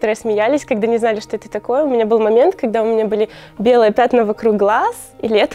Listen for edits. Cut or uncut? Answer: uncut